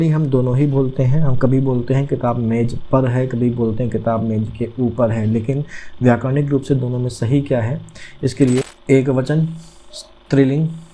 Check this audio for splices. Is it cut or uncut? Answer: cut